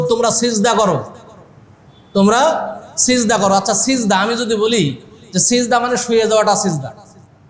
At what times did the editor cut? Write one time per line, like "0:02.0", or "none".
none